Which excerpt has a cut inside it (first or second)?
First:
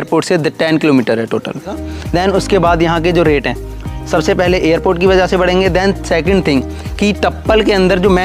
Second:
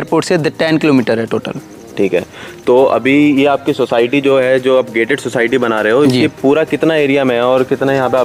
first